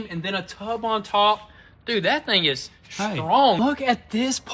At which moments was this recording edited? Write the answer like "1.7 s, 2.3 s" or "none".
3.6 s